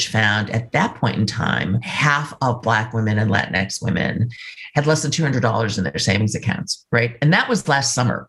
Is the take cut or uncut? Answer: cut